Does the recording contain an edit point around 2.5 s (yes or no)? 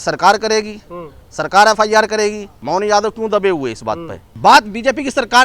yes